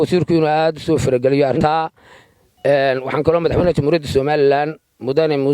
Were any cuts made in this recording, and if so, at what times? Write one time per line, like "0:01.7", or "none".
0:01.6